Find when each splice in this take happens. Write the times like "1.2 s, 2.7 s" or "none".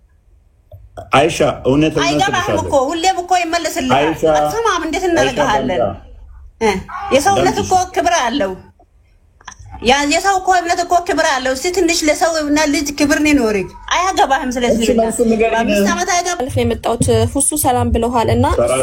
16.4 s